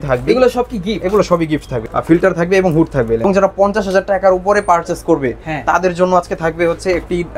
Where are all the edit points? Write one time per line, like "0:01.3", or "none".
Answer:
0:01.8
0:03.2